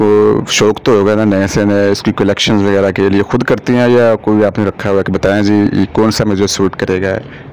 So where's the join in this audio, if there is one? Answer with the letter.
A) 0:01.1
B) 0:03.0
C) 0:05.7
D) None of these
D